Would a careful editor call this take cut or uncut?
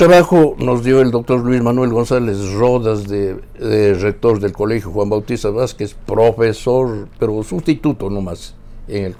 uncut